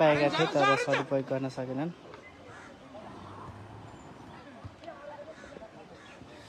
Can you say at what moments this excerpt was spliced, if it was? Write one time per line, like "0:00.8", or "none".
0:02.2